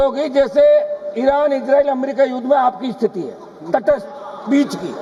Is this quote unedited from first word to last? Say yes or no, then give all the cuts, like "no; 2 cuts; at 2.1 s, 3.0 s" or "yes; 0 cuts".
yes; 0 cuts